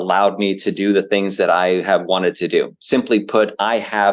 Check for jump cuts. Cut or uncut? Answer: uncut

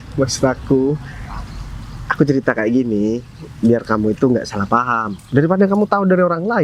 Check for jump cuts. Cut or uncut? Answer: uncut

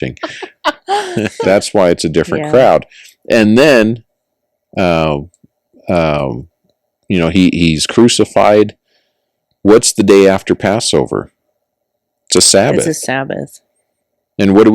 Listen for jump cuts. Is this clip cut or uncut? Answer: cut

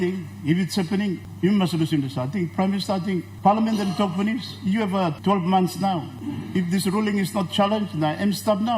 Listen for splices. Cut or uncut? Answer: cut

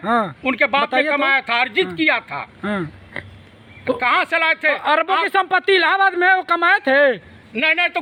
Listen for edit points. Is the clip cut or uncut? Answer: uncut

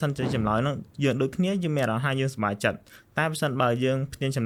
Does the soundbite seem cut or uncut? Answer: uncut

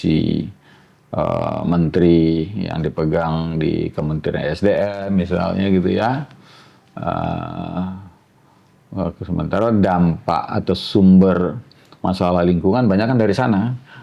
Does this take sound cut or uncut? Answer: uncut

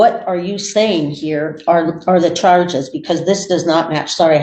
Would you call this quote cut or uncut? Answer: uncut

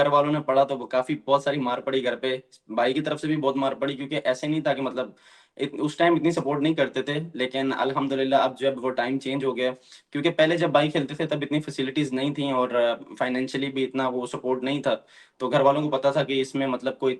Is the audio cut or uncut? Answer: uncut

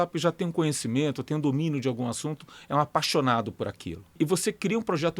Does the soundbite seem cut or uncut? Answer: cut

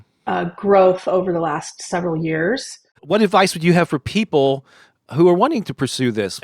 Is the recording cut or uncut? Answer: cut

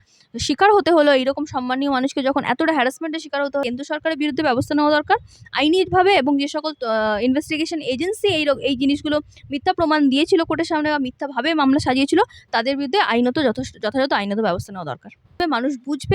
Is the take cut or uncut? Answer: cut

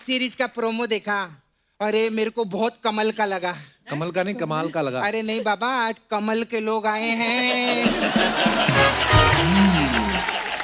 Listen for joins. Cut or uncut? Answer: uncut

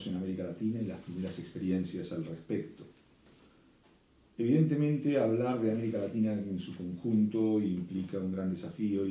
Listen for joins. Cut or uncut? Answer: uncut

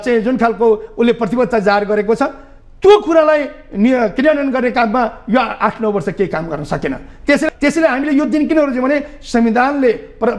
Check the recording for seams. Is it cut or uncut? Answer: cut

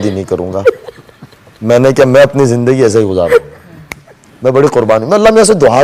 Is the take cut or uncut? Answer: uncut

